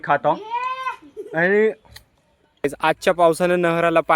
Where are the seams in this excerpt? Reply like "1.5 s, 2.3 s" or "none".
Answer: 2.7 s